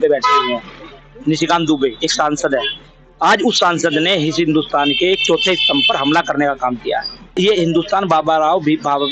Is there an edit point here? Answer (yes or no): yes